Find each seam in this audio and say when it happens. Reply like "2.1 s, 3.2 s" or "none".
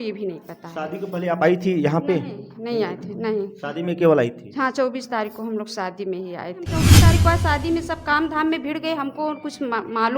6.9 s